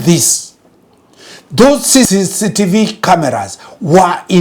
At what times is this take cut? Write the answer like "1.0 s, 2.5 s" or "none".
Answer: 2.1 s